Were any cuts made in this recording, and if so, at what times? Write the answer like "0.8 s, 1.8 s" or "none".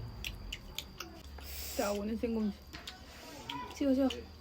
1.2 s